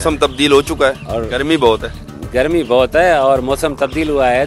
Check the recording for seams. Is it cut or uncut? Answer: cut